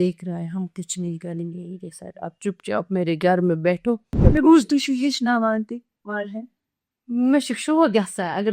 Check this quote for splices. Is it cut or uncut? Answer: cut